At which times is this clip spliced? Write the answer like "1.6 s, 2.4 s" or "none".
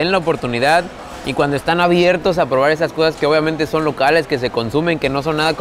none

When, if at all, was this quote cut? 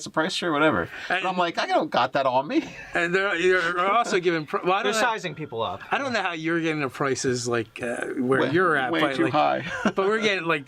7.1 s

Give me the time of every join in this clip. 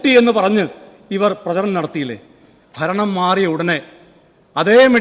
2.3 s

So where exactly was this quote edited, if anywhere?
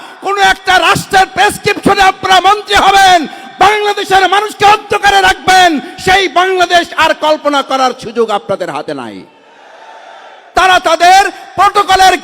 10.5 s

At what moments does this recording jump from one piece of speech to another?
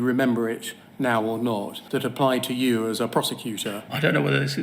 1.8 s, 3.8 s

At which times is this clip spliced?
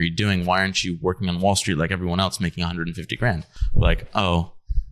3.6 s

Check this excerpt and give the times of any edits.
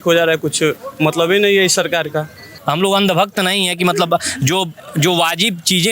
2.5 s

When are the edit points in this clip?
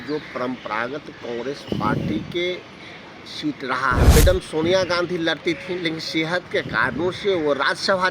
4.1 s

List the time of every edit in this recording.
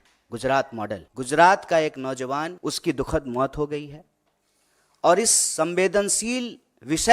1.1 s, 2.5 s

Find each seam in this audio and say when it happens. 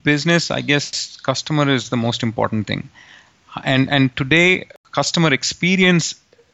4.8 s

